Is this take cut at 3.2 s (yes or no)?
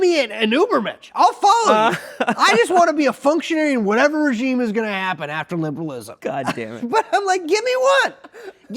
no